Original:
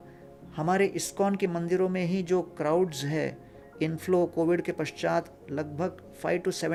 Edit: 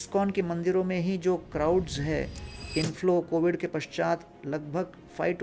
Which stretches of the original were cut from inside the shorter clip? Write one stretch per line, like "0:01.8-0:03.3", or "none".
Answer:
none